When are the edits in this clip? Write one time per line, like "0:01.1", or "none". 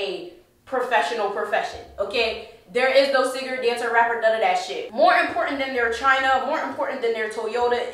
0:04.8